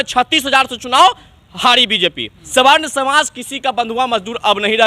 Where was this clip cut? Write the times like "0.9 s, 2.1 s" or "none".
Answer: 2.4 s